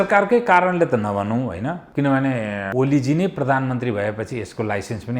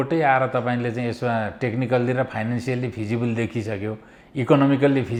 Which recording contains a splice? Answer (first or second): first